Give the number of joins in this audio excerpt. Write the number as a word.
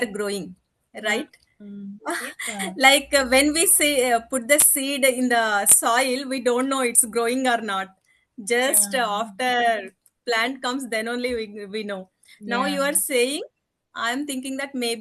zero